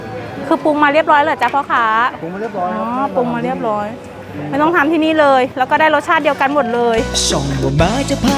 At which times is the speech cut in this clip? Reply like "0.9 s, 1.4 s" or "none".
7.2 s